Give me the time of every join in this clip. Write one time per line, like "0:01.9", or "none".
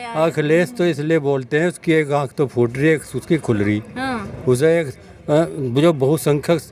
none